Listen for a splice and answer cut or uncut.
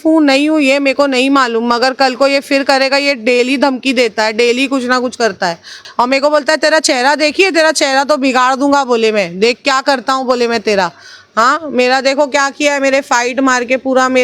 cut